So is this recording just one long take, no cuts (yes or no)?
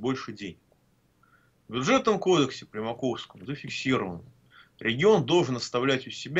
yes